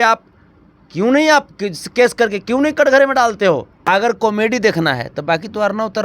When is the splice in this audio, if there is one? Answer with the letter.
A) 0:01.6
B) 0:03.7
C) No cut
B